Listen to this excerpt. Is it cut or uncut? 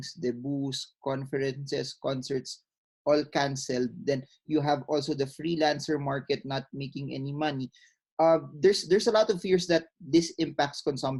uncut